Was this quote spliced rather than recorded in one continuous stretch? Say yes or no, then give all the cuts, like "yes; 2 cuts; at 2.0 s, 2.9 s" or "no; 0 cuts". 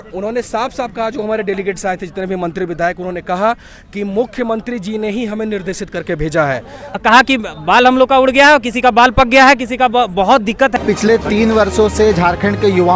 yes; 2 cuts; at 7.0 s, 10.7 s